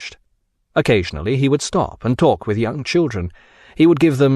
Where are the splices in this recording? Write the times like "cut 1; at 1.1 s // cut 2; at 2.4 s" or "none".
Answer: cut 1; at 1.3 s